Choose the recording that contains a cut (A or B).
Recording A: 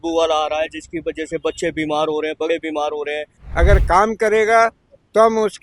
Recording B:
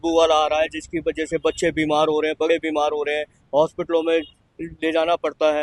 A